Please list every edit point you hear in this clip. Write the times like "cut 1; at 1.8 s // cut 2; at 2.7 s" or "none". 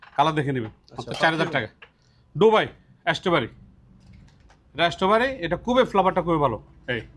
none